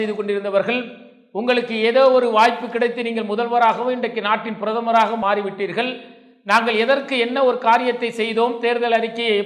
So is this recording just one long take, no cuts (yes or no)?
yes